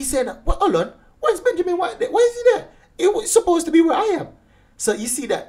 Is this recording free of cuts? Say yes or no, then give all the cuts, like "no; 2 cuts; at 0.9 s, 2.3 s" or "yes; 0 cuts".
yes; 0 cuts